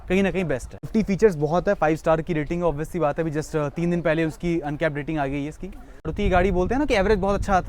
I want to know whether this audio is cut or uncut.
cut